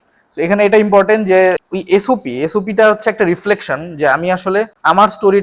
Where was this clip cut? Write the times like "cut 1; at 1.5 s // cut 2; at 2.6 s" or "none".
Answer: cut 1; at 1.6 s